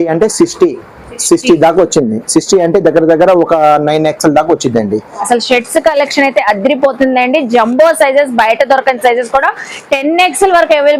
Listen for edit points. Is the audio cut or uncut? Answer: cut